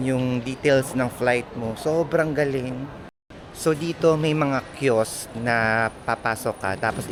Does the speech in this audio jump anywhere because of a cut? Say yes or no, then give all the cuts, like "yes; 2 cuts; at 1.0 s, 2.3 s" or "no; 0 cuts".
no; 0 cuts